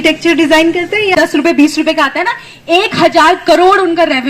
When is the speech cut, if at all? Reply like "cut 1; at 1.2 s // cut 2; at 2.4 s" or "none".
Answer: cut 1; at 1.3 s